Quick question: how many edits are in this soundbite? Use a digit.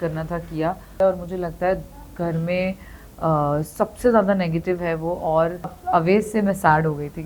2